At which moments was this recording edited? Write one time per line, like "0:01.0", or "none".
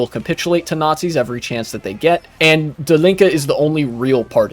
0:02.4